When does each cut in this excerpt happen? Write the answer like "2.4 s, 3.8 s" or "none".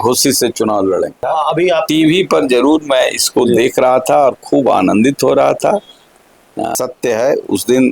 1.2 s, 6.7 s

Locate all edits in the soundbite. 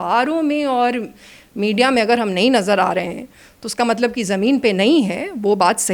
none

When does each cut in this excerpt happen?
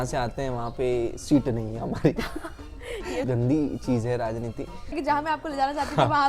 3.2 s, 5.0 s

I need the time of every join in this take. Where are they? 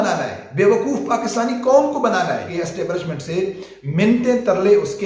2.5 s

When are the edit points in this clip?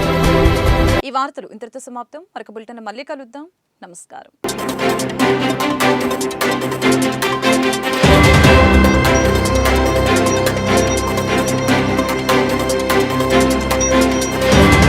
none

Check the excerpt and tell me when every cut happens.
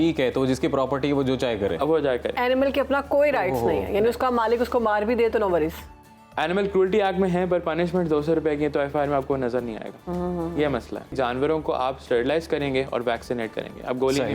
11.1 s

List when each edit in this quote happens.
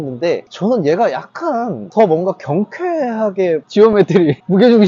3.6 s

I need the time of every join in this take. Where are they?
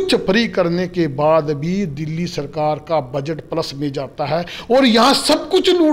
none

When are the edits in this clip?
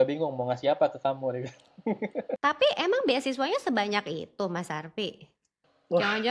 2.4 s

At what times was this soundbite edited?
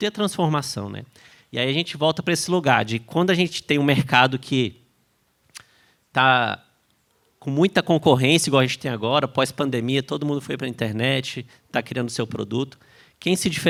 none

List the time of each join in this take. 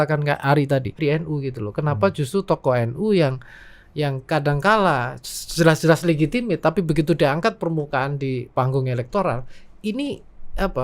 1.0 s

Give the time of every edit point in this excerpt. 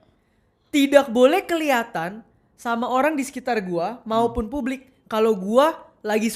none

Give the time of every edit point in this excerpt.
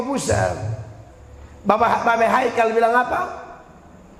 none

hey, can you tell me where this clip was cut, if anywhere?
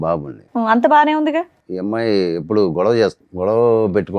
1.6 s, 3.2 s

